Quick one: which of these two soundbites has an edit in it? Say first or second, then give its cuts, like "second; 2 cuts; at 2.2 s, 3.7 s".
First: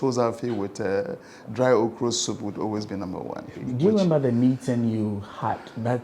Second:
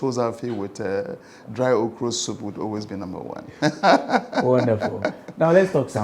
first; 1 cut; at 3.5 s